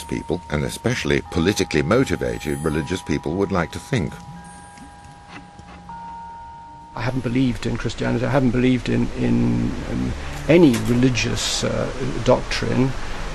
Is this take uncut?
yes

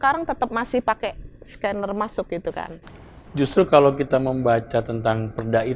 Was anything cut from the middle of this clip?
yes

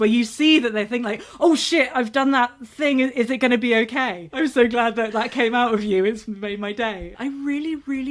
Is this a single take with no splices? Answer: no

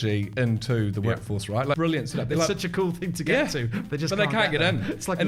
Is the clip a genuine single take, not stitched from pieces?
no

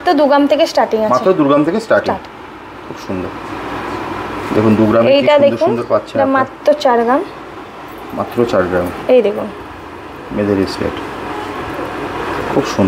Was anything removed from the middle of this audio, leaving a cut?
no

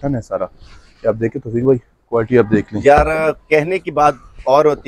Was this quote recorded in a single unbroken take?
yes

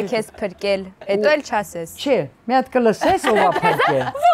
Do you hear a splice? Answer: no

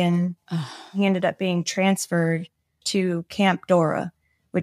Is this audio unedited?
no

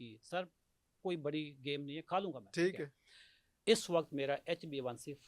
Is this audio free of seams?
no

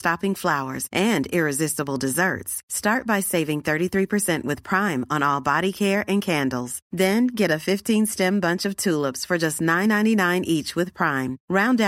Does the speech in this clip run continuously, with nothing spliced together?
yes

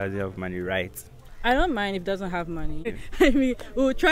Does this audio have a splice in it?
yes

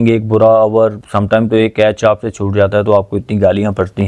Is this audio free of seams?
no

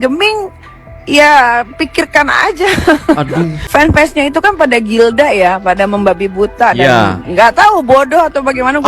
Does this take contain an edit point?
yes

